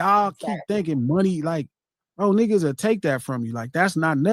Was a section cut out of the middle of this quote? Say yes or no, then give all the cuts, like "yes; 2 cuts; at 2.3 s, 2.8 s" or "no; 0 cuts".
no; 0 cuts